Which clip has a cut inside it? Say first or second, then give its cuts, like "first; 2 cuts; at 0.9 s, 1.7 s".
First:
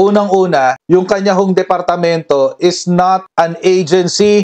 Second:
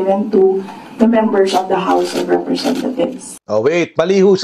second; 1 cut; at 3.3 s